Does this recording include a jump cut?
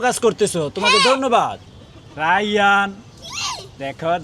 yes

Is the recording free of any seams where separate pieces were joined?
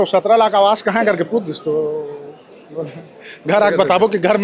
yes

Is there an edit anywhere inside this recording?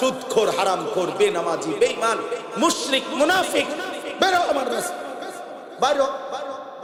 no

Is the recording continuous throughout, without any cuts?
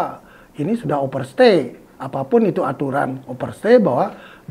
yes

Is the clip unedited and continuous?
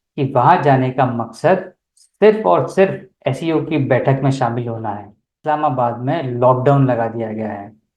no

